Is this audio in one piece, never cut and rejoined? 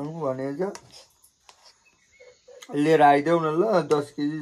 yes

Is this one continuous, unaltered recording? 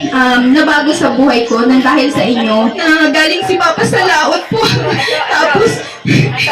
no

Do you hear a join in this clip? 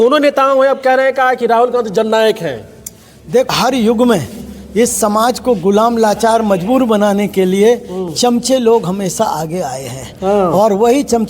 yes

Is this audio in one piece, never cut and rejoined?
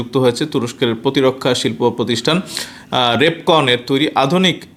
yes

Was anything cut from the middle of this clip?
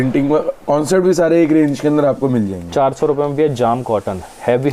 no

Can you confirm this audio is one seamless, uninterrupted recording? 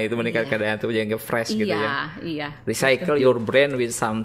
no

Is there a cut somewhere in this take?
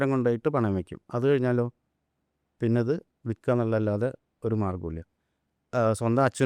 no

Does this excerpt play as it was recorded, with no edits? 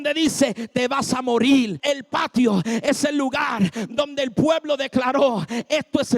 no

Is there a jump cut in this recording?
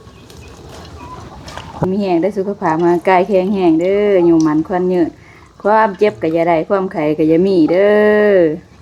yes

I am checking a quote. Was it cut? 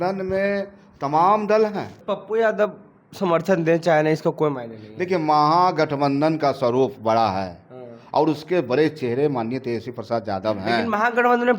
yes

